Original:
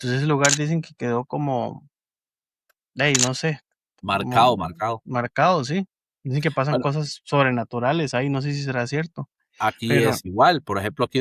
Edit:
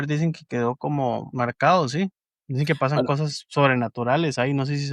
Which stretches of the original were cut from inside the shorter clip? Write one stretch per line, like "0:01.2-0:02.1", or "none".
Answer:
0:01.8-0:05.0